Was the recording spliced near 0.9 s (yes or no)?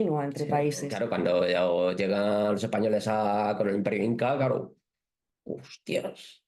yes